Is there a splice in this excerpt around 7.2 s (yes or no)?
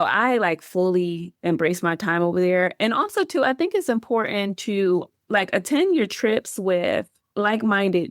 yes